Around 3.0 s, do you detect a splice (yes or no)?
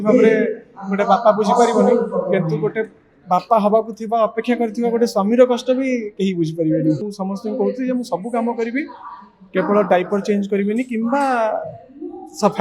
no